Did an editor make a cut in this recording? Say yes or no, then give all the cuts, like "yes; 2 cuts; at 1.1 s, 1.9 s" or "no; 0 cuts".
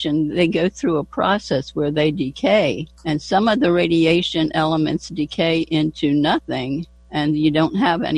yes; 2 cuts; at 2.9 s, 7.0 s